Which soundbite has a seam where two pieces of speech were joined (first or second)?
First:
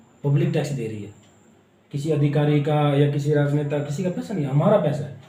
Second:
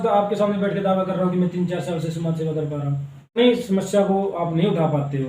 second